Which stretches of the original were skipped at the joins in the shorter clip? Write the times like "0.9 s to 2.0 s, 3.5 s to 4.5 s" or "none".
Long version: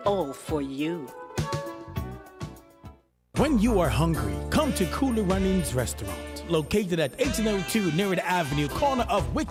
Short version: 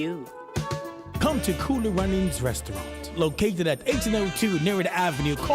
1.9 s to 4.4 s